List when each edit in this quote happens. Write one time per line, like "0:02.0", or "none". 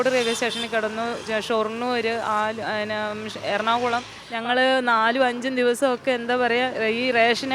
0:04.2